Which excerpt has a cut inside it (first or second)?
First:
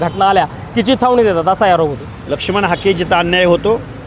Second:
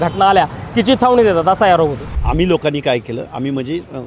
second